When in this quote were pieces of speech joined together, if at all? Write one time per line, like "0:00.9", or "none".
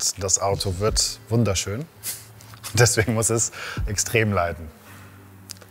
none